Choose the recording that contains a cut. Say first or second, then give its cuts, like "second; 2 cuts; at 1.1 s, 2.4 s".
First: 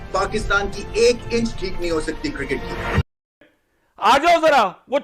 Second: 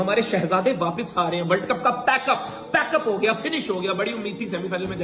first; 1 cut; at 3.3 s